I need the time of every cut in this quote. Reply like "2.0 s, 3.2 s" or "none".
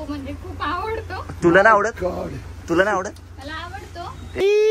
none